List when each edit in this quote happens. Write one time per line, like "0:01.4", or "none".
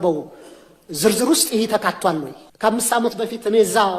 0:02.4